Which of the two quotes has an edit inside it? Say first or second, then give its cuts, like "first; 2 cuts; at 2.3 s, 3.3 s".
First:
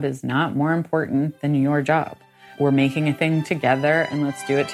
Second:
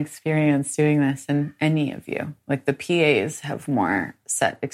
first; 1 cut; at 2.4 s